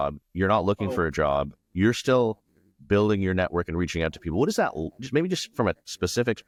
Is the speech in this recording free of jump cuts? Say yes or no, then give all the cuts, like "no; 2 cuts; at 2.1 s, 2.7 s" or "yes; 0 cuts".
yes; 0 cuts